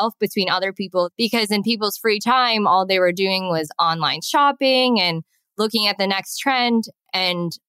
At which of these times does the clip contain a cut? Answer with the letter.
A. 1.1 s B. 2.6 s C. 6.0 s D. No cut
A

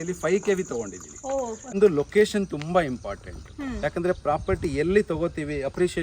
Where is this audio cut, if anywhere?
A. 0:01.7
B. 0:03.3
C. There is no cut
A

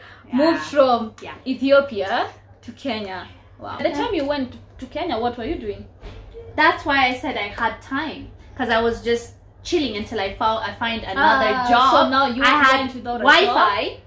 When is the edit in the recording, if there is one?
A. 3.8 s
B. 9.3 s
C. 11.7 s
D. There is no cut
A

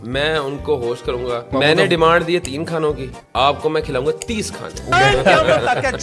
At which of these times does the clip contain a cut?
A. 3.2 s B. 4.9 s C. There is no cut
B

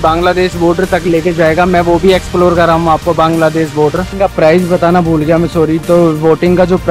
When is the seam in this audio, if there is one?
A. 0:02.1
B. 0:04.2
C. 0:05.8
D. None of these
B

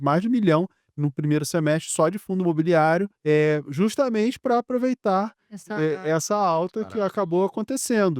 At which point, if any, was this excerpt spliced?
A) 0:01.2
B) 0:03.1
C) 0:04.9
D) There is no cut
B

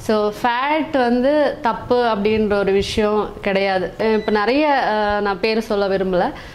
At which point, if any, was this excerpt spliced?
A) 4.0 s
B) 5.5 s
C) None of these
A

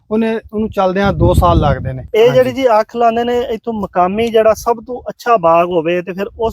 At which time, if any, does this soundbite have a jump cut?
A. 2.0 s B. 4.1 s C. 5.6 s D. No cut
A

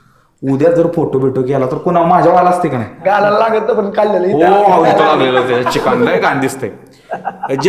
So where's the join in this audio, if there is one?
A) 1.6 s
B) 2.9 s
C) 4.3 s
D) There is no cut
D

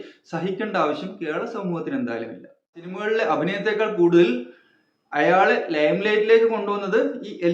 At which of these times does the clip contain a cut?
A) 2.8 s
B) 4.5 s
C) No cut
A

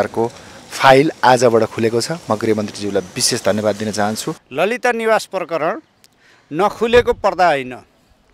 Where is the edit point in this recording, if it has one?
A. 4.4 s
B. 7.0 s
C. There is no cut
A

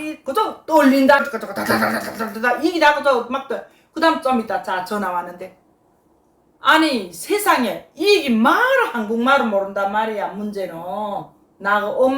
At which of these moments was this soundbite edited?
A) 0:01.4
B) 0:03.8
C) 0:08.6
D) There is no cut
A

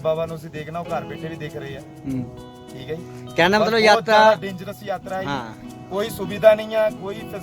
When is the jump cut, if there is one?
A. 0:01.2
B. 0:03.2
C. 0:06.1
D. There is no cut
D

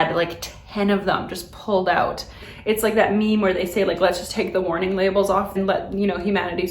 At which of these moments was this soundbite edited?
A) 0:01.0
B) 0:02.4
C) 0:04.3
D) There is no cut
B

